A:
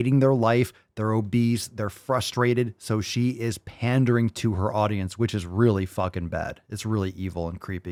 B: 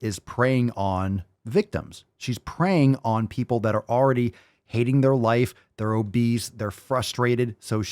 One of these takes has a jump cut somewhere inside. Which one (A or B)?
B